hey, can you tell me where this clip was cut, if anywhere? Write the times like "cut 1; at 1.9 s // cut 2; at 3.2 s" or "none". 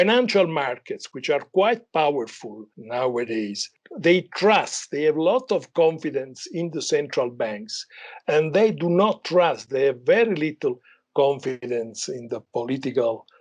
cut 1; at 3.6 s